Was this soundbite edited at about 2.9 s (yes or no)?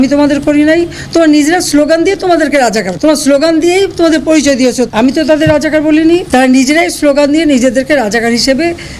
yes